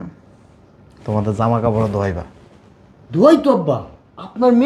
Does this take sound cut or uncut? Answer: uncut